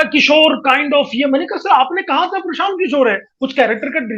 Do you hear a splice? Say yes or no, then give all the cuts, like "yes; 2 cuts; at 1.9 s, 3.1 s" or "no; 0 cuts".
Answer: yes; 1 cut; at 3.3 s